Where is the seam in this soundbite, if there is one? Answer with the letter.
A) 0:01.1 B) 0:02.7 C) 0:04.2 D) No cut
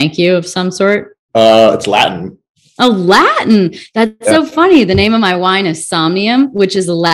A